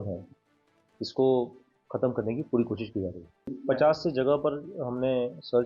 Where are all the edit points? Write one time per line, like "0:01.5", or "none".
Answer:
0:03.4